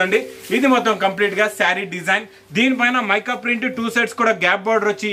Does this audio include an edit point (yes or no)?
no